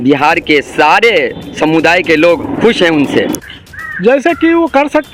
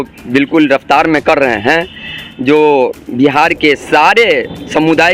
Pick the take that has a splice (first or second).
first